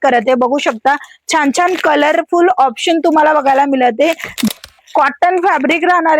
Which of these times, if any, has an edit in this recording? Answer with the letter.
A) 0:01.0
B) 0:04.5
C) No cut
B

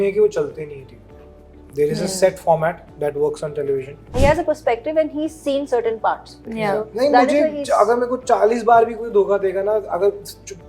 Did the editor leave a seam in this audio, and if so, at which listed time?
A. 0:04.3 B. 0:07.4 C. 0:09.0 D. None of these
A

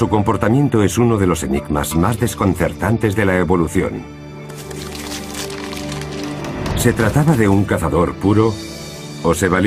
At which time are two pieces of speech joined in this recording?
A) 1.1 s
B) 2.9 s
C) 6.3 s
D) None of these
C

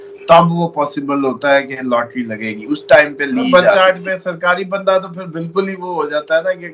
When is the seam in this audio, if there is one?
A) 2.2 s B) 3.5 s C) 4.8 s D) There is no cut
B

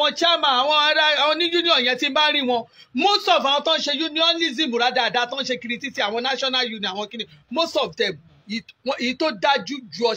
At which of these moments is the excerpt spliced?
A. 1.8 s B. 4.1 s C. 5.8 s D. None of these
D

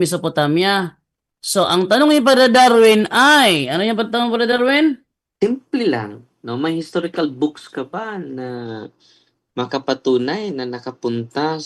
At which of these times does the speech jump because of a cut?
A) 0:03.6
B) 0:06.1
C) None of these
C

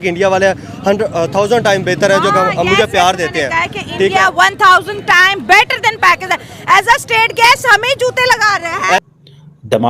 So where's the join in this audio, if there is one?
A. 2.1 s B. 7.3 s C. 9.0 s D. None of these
C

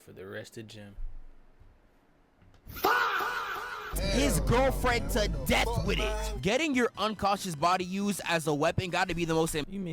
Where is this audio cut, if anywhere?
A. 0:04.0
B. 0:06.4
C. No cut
A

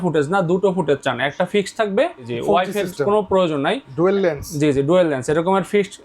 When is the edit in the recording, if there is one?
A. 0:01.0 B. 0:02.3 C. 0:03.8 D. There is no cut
B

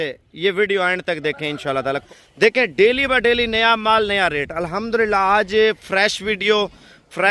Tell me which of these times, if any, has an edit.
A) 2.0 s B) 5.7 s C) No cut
A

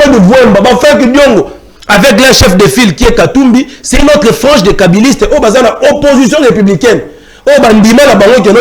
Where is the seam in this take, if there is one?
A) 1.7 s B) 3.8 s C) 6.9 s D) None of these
D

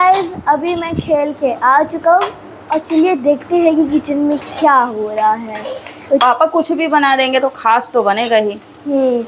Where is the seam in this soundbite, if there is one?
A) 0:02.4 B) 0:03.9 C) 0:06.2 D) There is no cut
C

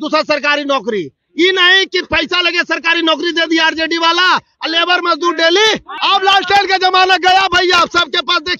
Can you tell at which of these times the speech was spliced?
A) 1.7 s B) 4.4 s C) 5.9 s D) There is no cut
C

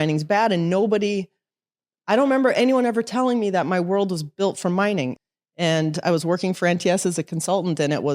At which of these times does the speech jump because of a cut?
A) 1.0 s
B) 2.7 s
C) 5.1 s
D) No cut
C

